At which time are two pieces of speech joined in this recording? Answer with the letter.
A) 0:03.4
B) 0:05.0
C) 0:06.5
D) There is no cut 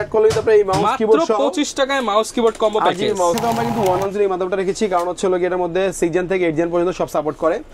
A